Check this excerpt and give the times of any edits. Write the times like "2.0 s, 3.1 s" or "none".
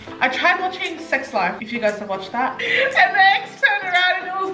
1.6 s, 2.6 s